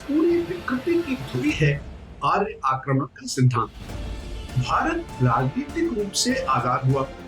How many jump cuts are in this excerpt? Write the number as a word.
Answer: one